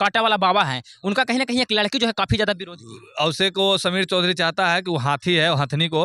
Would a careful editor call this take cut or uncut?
uncut